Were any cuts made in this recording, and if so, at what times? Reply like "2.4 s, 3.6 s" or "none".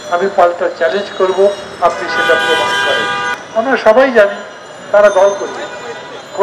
3.3 s